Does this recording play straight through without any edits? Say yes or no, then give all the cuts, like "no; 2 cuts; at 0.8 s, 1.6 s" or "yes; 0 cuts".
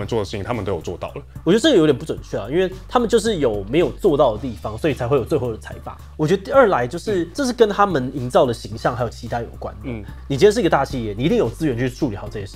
no; 4 cuts; at 1.2 s, 6.0 s, 7.3 s, 10.1 s